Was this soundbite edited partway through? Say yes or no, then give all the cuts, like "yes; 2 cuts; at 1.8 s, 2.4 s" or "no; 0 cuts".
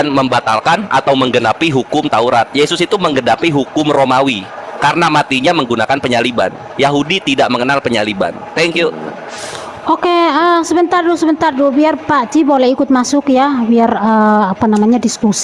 no; 0 cuts